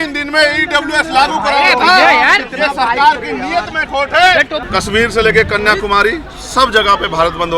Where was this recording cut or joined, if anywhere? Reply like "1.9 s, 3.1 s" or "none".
4.6 s